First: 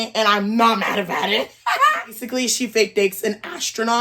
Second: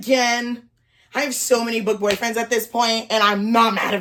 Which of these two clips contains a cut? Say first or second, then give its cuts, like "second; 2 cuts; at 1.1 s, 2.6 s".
first; 1 cut; at 2.2 s